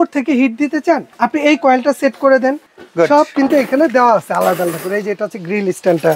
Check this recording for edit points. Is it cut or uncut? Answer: cut